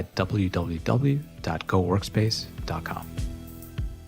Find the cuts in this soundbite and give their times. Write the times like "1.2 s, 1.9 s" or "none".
3.0 s